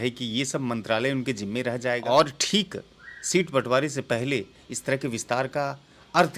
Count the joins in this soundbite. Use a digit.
1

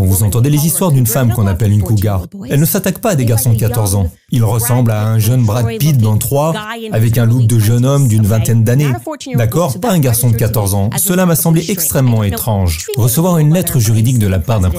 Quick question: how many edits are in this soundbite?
1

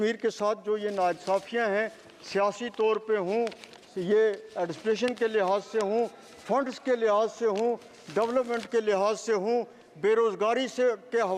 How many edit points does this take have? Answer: 0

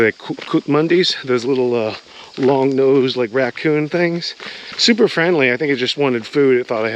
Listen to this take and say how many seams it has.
0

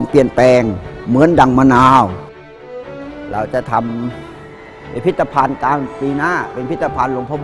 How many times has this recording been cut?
1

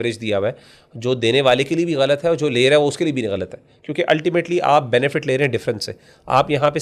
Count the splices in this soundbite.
0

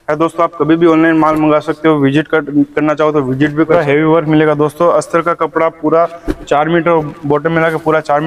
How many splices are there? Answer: 1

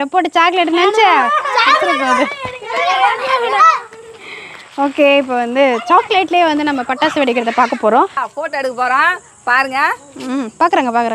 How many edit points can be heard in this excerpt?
1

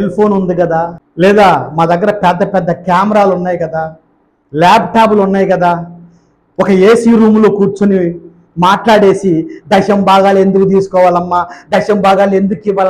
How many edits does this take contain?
1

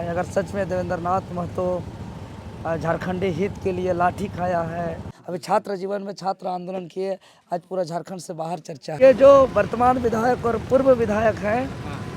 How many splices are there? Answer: 2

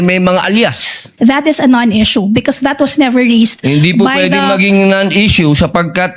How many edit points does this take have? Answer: 1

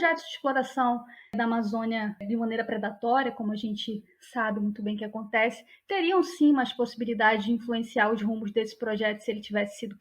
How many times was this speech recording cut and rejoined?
2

